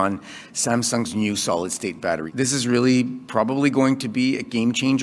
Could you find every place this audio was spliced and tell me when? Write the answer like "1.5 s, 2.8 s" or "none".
2.3 s